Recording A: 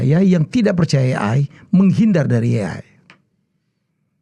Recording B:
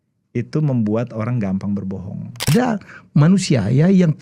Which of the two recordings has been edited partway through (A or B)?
B